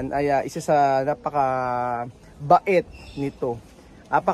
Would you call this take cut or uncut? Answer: uncut